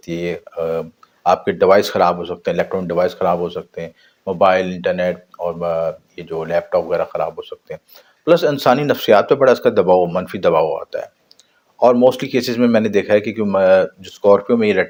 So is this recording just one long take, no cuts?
yes; 0 cuts

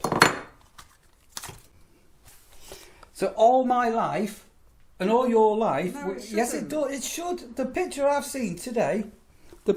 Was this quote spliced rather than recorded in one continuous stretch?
no; 0 cuts

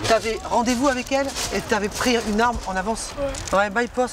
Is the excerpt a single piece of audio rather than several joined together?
no; 1 cut; at 3.1 s

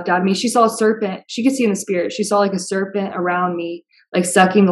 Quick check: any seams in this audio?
no; 0 cuts

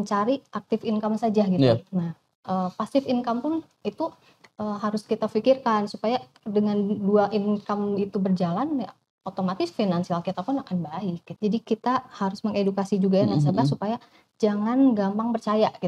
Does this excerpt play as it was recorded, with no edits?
no; 1 cut; at 11.3 s

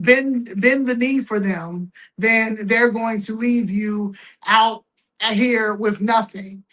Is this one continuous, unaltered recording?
yes; 0 cuts

